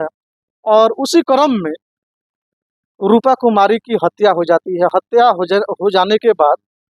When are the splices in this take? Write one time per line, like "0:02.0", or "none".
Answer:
none